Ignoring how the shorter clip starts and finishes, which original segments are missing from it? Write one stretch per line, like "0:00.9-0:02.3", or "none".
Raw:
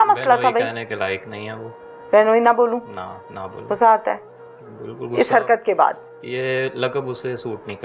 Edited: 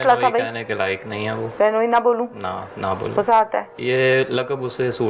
0:01.6-0:02.0
0:04.3-0:06.2